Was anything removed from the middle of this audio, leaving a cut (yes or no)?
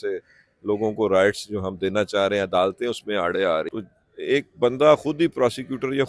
yes